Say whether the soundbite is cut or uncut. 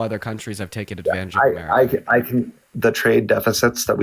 cut